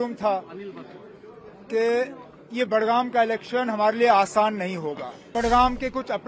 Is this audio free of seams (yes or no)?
no